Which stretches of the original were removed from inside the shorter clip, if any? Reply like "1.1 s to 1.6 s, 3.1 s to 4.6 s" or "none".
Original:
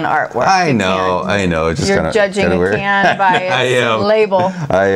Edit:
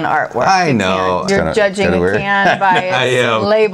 1.2 s to 1.8 s